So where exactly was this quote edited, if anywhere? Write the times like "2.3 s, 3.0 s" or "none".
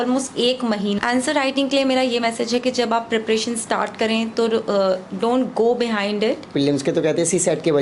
1.0 s, 6.5 s